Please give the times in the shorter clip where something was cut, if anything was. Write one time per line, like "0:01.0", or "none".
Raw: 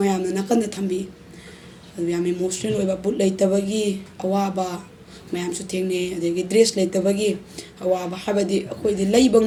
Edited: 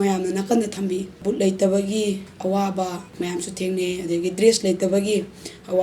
0:01.2
0:03.0

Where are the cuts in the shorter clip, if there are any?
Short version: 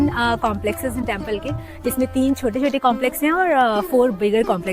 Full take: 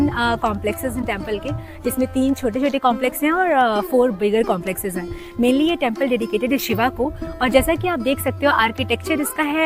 none

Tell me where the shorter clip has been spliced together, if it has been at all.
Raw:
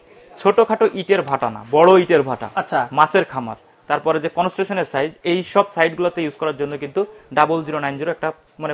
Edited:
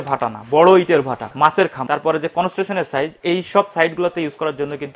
0:01.4

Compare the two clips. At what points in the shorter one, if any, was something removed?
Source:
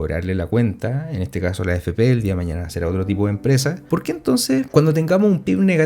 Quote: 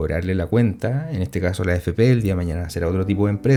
none

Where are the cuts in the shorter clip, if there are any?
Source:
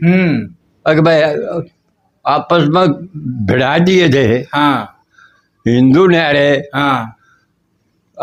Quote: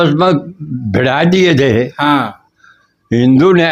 none

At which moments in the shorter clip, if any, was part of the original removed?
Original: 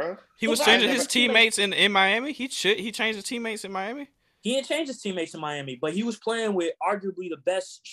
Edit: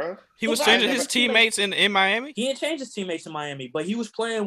0:02.3

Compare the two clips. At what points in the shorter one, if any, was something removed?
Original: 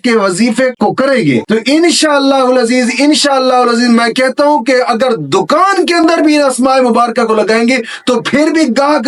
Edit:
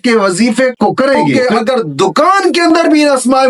0:01.4

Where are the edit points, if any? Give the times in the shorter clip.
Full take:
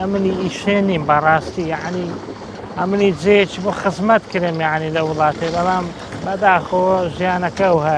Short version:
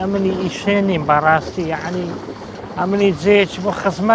none

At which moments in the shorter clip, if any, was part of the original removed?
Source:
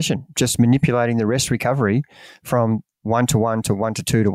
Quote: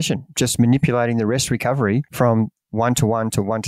0:02.1

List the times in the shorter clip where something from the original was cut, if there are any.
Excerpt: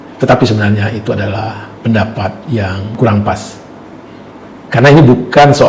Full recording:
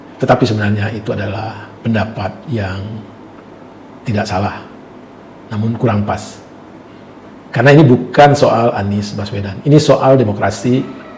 0:03.0

